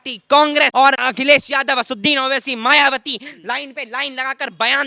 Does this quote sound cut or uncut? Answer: cut